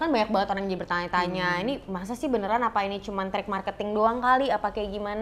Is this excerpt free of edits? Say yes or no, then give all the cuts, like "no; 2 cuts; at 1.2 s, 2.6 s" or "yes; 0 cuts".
yes; 0 cuts